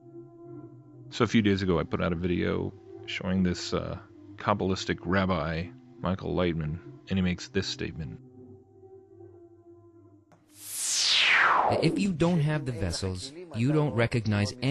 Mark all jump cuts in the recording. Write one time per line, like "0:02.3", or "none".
0:01.0